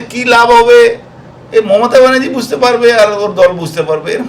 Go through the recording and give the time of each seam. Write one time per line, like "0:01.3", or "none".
none